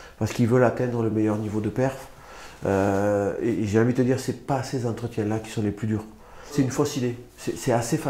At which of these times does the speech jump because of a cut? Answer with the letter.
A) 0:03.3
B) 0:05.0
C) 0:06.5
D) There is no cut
C